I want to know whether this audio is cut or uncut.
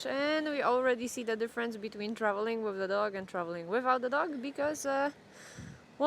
uncut